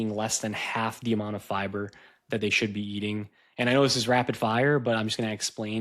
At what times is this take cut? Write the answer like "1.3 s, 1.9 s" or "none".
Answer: none